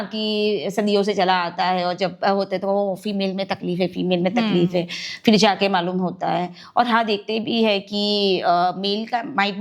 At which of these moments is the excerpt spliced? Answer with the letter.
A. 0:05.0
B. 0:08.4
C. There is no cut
C